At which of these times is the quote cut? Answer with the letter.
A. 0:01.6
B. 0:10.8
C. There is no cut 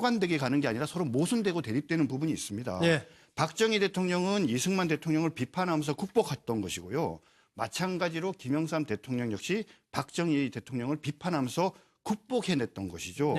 B